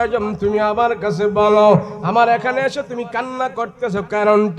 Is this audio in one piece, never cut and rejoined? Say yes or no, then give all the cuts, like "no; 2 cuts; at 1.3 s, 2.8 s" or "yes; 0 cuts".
yes; 0 cuts